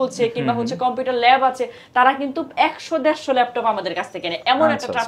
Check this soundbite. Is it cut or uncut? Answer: uncut